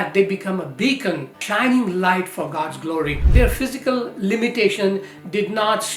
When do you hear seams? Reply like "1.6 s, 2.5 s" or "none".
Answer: 3.2 s

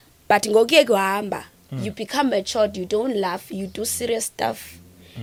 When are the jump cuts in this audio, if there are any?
none

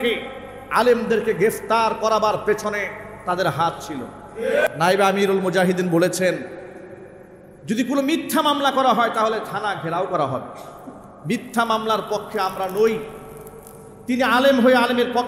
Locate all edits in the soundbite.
4.7 s

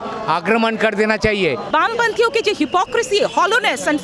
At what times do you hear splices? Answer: 1.7 s

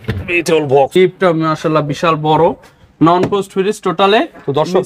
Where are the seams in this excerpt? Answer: 1.0 s

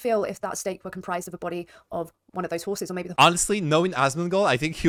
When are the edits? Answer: none

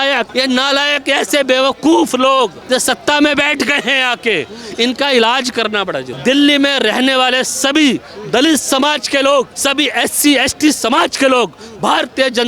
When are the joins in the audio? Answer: 6.1 s

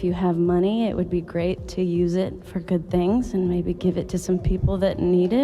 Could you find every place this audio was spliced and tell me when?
3.3 s

